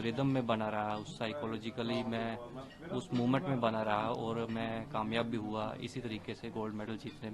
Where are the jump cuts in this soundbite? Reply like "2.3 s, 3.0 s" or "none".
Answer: none